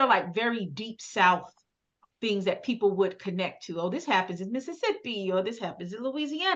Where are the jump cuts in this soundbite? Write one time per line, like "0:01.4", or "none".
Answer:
none